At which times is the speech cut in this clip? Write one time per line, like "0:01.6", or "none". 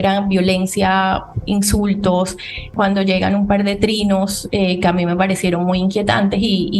0:02.7